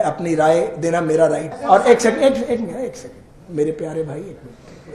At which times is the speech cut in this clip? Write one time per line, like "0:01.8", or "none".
0:01.5